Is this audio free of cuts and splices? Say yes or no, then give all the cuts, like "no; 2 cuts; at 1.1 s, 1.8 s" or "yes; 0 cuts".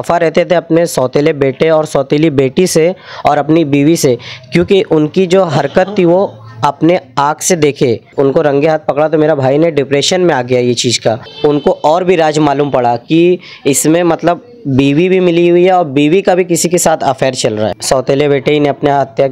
no; 3 cuts; at 8.1 s, 11.3 s, 17.8 s